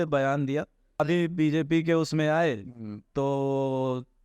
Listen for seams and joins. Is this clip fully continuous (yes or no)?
no